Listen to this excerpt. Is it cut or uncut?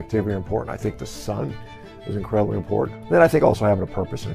cut